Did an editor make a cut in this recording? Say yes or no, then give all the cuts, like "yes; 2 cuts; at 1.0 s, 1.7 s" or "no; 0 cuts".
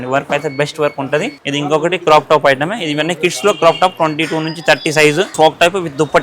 yes; 2 cuts; at 1.4 s, 5.3 s